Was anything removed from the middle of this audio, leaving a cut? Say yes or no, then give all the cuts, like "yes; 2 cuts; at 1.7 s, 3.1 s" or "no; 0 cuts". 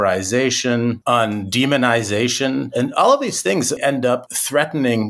yes; 3 cuts; at 1.0 s, 2.7 s, 4.1 s